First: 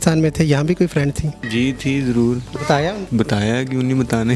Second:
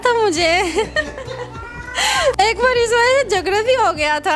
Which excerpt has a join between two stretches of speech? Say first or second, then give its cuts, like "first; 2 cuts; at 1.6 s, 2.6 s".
first; 2 cuts; at 1.3 s, 3.0 s